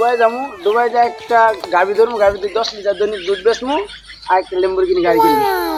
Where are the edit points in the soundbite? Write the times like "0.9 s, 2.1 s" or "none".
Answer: none